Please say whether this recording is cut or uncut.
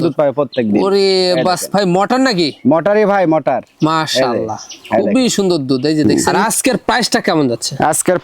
cut